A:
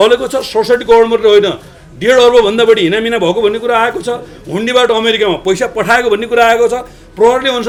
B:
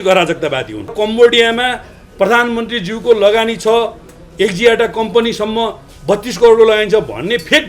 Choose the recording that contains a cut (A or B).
B